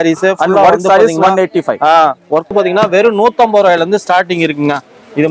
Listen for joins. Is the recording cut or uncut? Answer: cut